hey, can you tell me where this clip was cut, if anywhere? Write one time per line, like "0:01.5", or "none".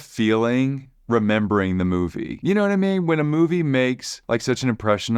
0:02.3
0:04.1